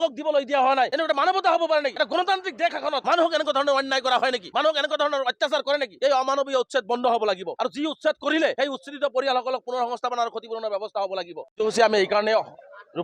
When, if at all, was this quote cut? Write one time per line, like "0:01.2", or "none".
0:00.9
0:01.9
0:03.0
0:04.4
0:05.9
0:07.5
0:08.5
0:11.4